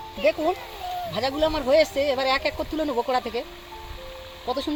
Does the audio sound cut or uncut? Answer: uncut